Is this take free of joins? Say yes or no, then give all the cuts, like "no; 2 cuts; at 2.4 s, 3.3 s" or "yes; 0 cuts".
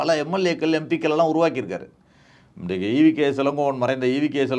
yes; 0 cuts